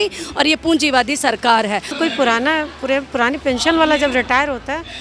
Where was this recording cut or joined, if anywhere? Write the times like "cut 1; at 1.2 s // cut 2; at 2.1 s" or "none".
cut 1; at 1.9 s

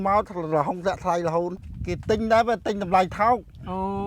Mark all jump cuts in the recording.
cut 1; at 1.6 s

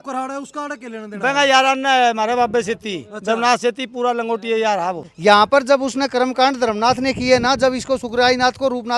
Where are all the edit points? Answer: cut 1; at 5.0 s

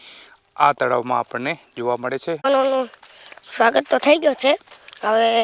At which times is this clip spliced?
cut 1; at 2.5 s

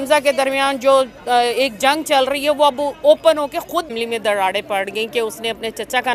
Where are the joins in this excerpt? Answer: cut 1; at 3.9 s

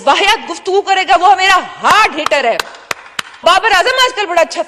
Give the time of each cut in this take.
cut 1; at 3.4 s

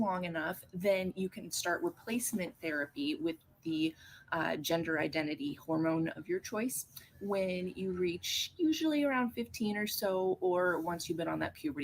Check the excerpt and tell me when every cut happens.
cut 1; at 10.6 s

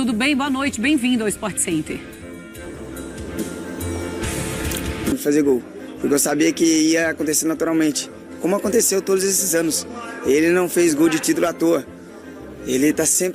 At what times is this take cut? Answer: cut 1; at 5.1 s

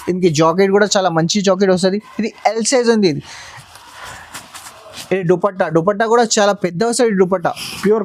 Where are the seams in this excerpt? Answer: none

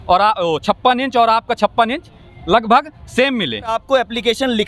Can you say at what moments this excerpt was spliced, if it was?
cut 1; at 3.8 s

